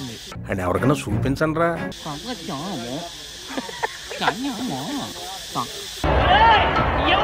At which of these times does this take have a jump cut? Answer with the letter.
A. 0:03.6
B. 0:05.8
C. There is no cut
B